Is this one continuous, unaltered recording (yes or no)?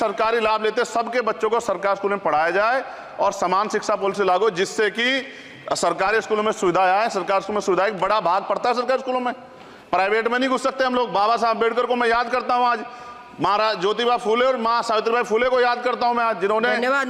yes